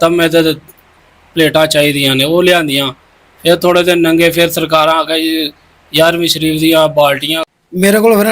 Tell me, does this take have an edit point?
yes; 1 cut; at 7.3 s

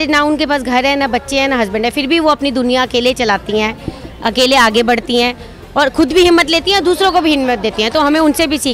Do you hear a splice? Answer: no; 0 cuts

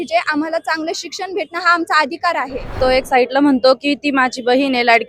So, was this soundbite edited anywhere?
yes; 1 cut; at 2.8 s

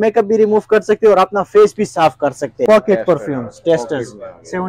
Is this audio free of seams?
no; 1 cut; at 2.7 s

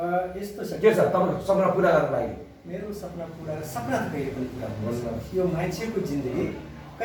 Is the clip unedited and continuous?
yes; 0 cuts

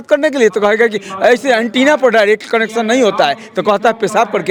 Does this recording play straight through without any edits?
yes; 0 cuts

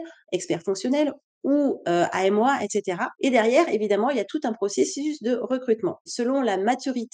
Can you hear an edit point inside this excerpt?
yes; 1 cut; at 6.1 s

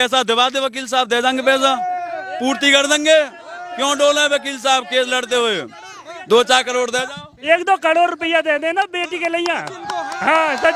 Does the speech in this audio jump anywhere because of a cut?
no; 0 cuts

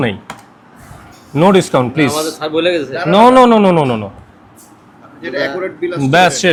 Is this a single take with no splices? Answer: yes; 0 cuts

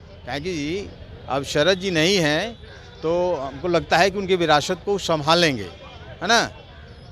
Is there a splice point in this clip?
no; 0 cuts

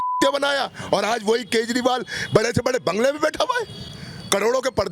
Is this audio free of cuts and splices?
yes; 0 cuts

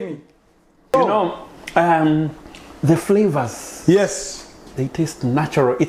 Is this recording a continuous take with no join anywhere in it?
no; 1 cut; at 0.9 s

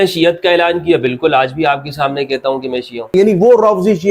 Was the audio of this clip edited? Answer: yes; 1 cut; at 3.1 s

